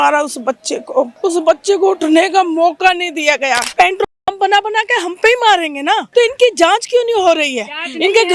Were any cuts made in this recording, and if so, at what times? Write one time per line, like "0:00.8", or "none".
0:01.1
0:03.7
0:06.1